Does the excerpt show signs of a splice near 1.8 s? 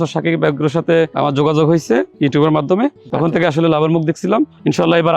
no; 1 cut; at 3.1 s

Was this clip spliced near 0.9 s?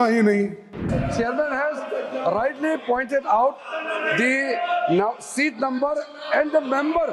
yes; 1 cut; at 0.9 s

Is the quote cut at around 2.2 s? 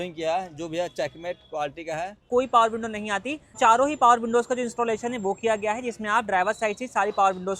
yes; 2 cuts; at 2.2 s, 3.5 s

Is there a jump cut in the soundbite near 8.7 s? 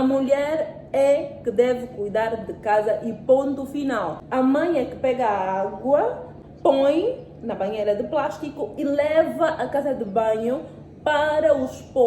no; 2 cuts; at 4.2 s, 6.3 s

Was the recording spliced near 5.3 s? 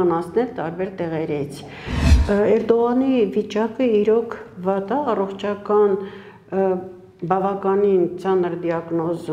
no; 1 cut; at 2.1 s

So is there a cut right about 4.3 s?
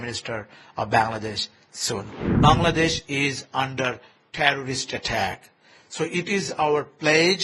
no; 1 cut; at 2.2 s

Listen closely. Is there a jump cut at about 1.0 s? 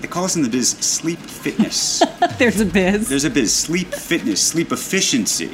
no; 0 cuts

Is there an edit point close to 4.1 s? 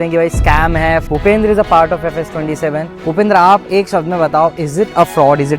no; 2 cuts; at 1.1 s, 2.9 s

